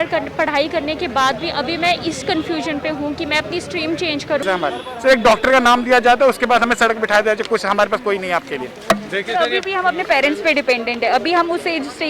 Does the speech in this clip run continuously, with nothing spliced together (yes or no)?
no